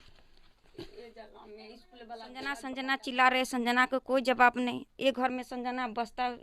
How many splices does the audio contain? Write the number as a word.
one